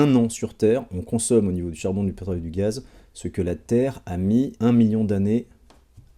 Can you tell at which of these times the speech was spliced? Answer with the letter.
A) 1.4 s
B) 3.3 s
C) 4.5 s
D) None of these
C